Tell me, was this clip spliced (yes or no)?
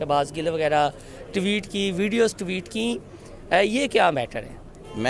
no